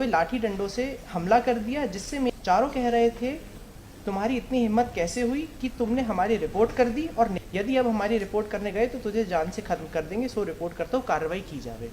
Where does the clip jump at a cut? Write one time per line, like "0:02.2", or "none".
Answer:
0:02.3
0:07.1

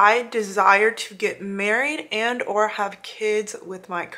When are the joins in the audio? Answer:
none

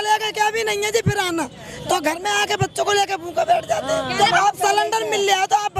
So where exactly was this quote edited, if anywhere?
0:04.2

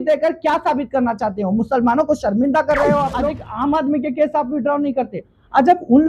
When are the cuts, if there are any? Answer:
0:03.4

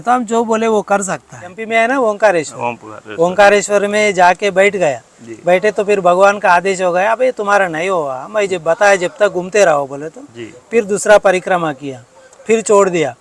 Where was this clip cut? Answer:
0:01.6

